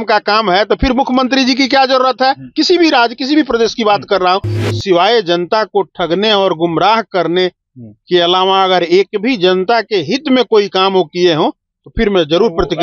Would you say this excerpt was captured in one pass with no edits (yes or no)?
no